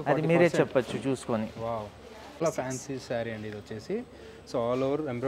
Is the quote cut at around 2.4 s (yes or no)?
yes